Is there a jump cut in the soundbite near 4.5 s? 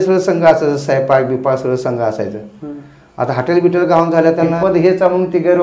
yes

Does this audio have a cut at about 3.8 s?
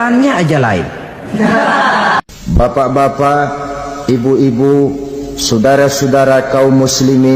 no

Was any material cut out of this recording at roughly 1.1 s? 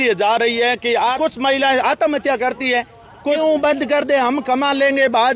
yes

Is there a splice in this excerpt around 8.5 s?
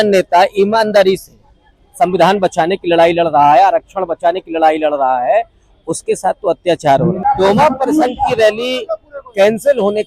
no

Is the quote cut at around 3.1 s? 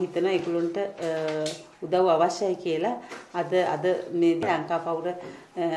no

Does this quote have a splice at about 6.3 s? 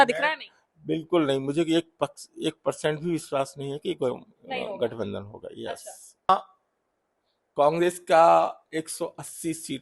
yes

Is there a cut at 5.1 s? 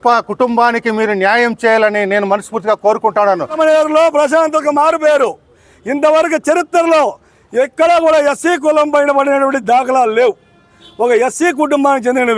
no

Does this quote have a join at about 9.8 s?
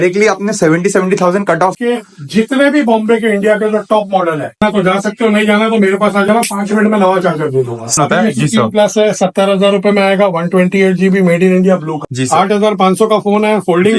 no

